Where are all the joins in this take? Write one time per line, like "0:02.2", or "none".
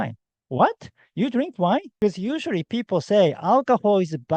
0:01.9

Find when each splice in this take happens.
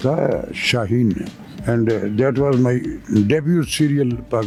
none

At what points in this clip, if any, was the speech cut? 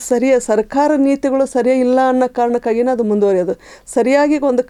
none

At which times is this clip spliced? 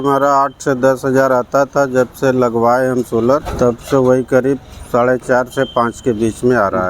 0:03.5

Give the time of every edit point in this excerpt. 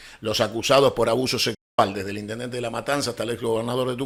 none

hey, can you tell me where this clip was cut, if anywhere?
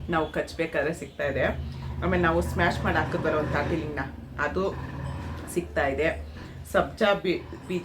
none

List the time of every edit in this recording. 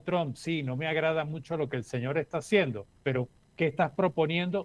0:03.2

